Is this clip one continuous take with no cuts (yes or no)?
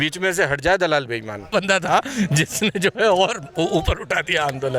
no